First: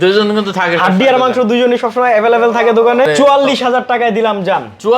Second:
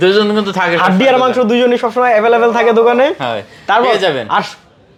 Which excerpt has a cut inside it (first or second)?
first